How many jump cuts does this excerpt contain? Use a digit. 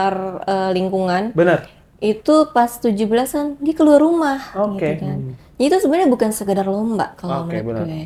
0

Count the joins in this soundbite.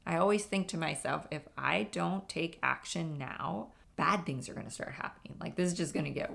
1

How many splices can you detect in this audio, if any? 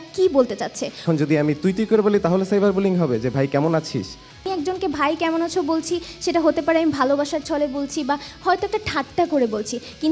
2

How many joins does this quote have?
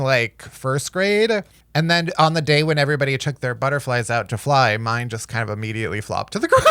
1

